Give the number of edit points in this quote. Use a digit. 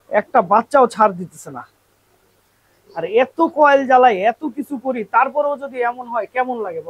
0